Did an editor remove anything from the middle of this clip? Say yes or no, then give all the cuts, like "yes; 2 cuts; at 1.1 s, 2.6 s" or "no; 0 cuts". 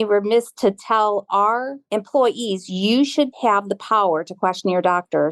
yes; 2 cuts; at 1.8 s, 3.3 s